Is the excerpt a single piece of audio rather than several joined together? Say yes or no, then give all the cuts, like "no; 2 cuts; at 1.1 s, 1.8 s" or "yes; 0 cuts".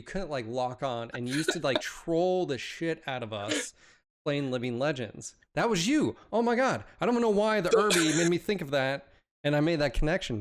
yes; 0 cuts